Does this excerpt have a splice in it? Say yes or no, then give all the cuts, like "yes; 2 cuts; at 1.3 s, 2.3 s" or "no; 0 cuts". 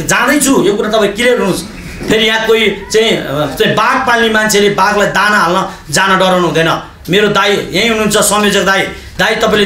no; 0 cuts